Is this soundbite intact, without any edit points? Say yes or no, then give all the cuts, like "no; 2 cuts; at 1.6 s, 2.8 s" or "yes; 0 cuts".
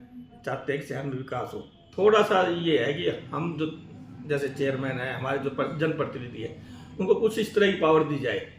no; 1 cut; at 1.8 s